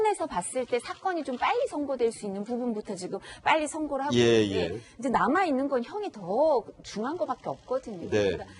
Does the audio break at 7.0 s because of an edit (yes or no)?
yes